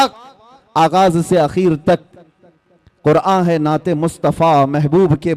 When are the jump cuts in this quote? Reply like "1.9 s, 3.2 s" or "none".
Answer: none

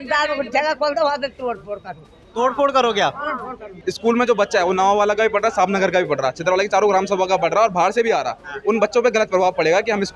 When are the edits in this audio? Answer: 3.6 s

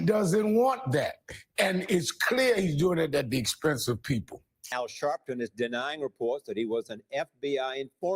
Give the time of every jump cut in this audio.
4.7 s

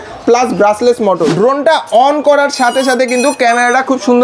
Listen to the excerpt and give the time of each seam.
1.3 s

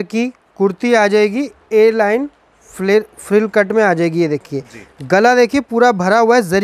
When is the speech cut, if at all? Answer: none

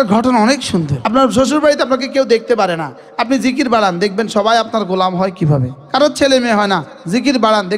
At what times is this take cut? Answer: 1.0 s, 5.7 s

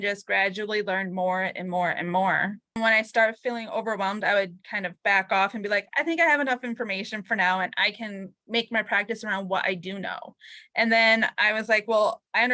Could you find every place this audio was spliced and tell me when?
2.8 s

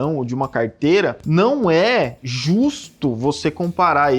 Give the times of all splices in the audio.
1.2 s

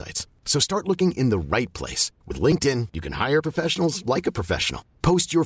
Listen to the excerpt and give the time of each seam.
none

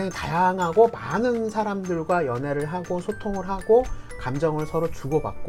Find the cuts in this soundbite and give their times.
none

